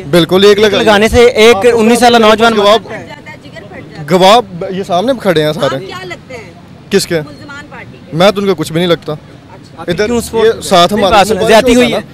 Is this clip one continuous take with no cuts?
yes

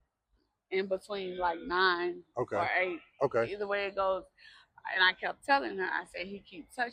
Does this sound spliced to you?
no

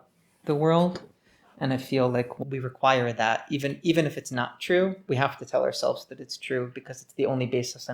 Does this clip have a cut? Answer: yes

